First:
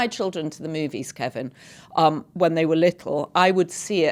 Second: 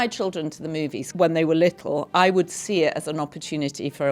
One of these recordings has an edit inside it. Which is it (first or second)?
second